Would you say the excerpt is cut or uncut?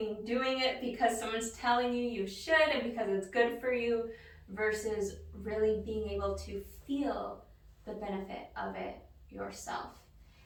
uncut